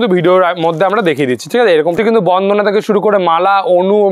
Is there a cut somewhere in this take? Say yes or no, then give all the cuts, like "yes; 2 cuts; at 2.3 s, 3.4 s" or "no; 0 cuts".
yes; 1 cut; at 1.9 s